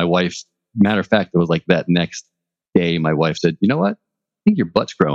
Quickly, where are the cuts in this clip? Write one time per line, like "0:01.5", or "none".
none